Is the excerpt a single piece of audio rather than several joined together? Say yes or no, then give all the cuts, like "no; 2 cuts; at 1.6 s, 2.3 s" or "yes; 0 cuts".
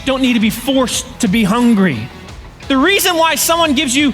no; 2 cuts; at 1.0 s, 2.2 s